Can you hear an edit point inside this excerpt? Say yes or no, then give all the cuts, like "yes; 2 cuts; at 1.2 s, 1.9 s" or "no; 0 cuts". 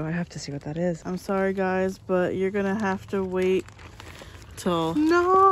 yes; 1 cut; at 1.0 s